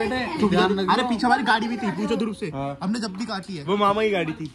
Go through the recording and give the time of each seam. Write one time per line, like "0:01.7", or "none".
none